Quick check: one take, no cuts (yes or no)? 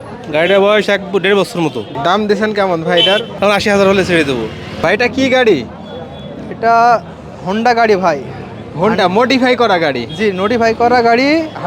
no